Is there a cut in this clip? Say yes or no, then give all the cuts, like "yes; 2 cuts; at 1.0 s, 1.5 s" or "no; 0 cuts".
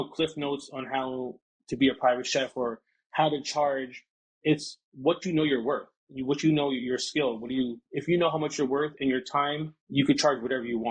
no; 0 cuts